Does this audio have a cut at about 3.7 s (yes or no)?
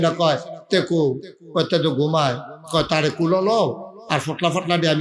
no